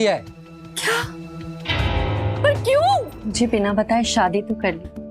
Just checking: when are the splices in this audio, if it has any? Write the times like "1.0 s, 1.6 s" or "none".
3.2 s